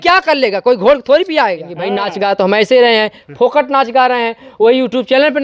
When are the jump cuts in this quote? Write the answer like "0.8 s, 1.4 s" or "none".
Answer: 2.0 s